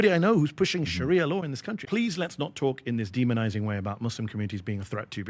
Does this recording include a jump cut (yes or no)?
yes